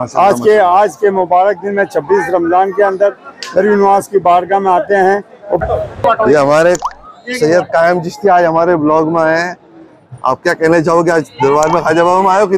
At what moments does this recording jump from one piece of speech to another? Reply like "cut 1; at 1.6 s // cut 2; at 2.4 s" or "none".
cut 1; at 5.6 s